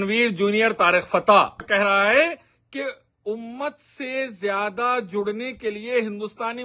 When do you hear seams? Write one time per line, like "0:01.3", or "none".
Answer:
0:01.6